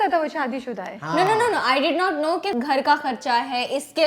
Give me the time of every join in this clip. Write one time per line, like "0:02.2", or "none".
0:02.5